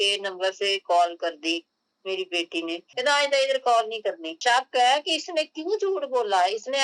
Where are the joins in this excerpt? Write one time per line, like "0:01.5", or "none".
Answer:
0:02.8
0:04.4